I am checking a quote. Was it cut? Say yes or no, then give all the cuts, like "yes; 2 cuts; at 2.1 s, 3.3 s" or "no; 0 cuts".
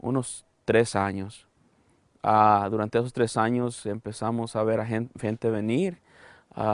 no; 0 cuts